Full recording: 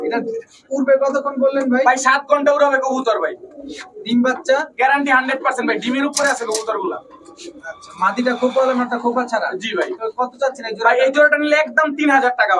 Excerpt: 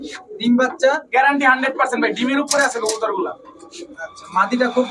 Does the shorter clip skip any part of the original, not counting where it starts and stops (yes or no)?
no